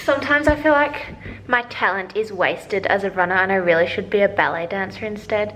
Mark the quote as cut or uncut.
uncut